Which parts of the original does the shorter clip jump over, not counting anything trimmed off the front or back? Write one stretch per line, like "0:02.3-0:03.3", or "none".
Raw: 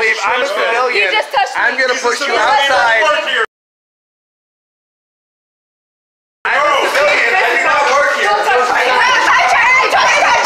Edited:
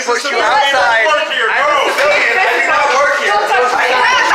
0:03.4-0:06.4